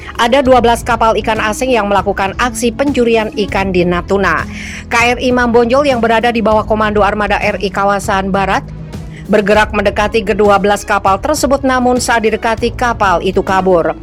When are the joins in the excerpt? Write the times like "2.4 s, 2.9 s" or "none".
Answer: none